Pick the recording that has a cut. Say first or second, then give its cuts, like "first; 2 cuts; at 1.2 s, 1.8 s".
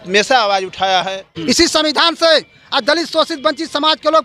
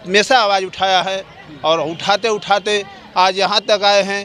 first; 1 cut; at 1.3 s